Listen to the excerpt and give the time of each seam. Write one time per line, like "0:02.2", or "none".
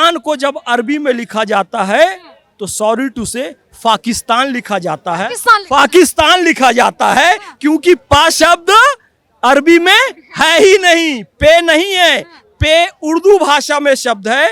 none